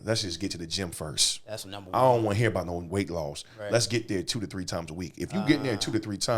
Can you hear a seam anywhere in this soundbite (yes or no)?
no